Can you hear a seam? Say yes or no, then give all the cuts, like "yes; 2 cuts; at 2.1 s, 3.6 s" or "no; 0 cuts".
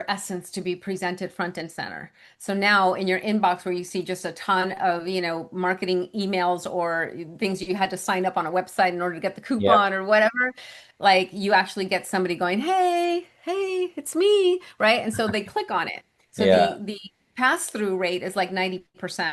no; 0 cuts